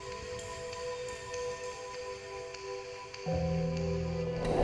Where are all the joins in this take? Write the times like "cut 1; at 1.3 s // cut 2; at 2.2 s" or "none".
none